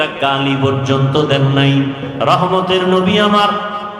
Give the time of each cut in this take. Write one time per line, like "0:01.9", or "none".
0:02.1